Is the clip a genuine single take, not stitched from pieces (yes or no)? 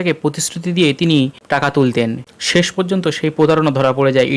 no